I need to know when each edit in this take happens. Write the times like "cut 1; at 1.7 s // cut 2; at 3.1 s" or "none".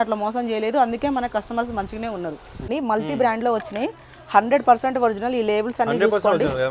cut 1; at 2.7 s